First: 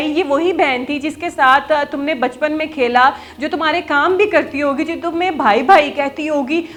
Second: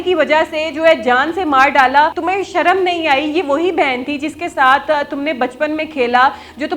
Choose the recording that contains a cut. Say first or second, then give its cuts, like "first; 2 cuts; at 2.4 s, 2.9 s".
second; 1 cut; at 2.2 s